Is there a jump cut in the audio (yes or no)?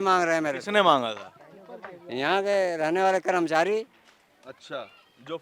no